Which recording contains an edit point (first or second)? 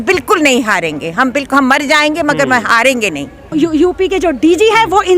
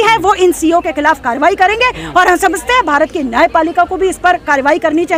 first